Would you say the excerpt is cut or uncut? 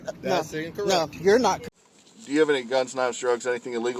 cut